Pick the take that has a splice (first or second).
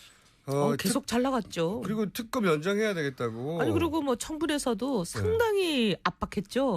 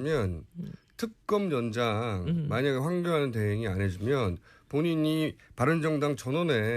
first